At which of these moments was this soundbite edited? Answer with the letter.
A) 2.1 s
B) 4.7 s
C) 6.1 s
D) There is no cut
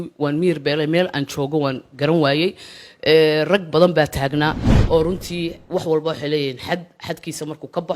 B